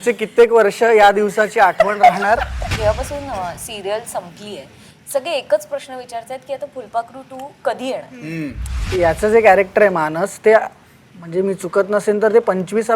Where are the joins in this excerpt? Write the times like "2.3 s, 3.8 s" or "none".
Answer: 2.6 s, 8.8 s